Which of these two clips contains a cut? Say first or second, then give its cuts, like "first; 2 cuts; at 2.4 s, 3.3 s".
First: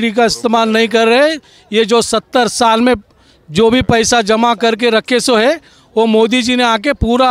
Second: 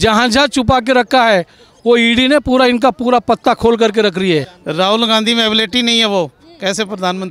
second; 1 cut; at 4.6 s